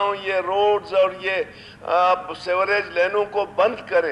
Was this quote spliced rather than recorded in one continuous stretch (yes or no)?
no